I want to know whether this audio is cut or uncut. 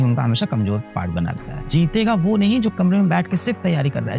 cut